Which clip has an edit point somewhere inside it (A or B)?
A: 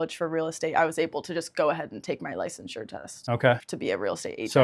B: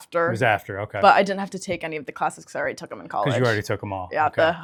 A